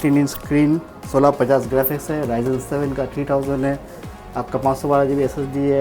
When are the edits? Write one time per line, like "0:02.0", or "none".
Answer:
none